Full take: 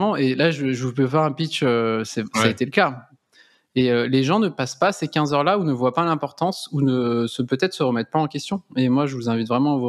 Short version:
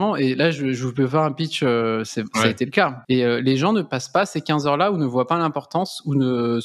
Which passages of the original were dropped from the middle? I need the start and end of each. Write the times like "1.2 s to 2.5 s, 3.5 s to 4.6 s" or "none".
3.0 s to 3.6 s